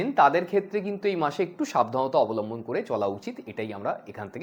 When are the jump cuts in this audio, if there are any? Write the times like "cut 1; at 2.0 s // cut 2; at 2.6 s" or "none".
none